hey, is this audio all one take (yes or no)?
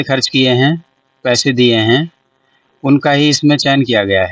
yes